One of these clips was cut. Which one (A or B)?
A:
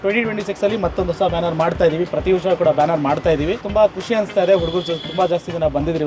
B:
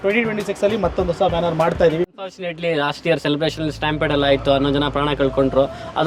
B